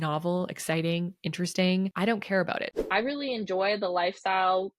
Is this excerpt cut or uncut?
cut